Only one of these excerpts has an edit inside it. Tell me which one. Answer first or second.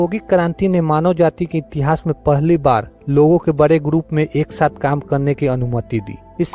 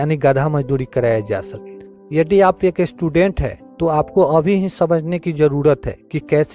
second